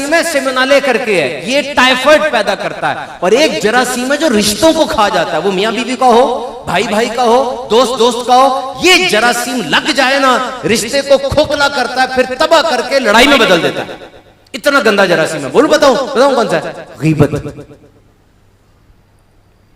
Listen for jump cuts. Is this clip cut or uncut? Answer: uncut